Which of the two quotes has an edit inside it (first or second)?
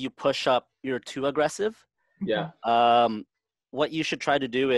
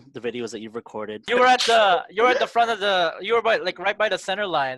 second